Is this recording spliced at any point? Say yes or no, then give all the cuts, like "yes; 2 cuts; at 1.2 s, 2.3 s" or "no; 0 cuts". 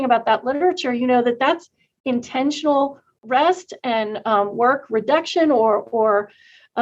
no; 0 cuts